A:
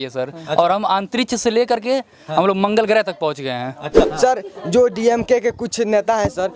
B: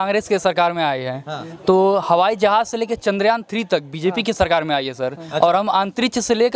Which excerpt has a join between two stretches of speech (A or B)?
A